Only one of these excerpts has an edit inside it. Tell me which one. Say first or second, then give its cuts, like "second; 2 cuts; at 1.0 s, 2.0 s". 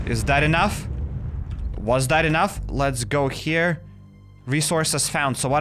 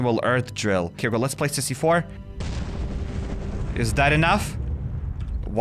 second; 2 cuts; at 1.0 s, 2.2 s